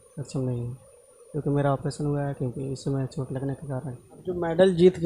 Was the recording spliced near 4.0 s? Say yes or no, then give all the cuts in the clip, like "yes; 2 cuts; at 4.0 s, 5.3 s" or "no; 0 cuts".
yes; 1 cut; at 4.0 s